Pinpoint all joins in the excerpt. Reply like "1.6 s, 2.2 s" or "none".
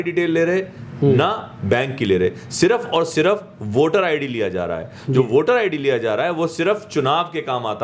none